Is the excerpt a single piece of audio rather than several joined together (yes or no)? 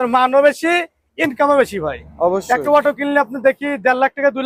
yes